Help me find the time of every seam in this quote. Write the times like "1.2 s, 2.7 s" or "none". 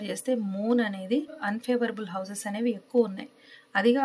1.3 s